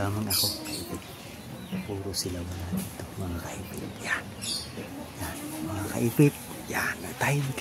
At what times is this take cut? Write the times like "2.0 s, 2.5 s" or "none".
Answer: none